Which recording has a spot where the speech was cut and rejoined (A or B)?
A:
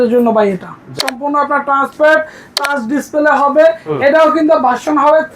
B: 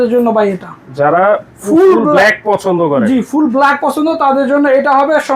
A